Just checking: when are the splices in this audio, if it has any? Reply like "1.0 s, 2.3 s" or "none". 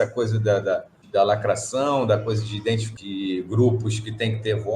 1.0 s, 2.9 s